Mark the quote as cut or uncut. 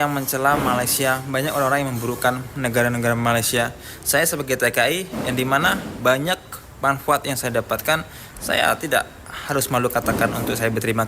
uncut